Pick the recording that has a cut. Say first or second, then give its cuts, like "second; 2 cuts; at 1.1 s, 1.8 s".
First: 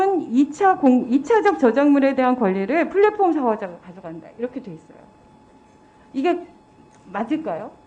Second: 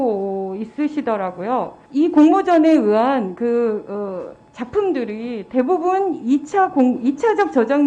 second; 1 cut; at 1.8 s